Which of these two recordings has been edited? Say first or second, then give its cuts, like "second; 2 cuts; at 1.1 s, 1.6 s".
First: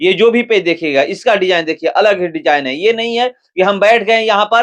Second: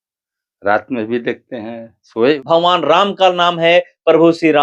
second; 1 cut; at 2.3 s